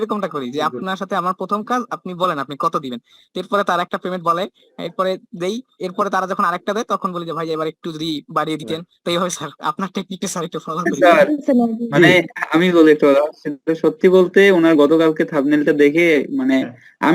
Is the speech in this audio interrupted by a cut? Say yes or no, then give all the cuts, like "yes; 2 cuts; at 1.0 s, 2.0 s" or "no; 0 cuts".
yes; 1 cut; at 10.9 s